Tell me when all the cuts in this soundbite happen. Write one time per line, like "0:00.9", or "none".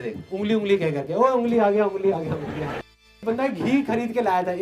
0:03.2